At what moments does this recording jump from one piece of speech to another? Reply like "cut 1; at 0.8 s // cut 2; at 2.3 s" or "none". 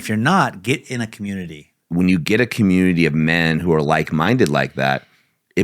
cut 1; at 1.8 s